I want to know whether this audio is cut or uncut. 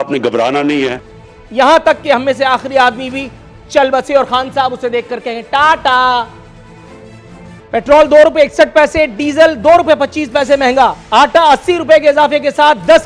cut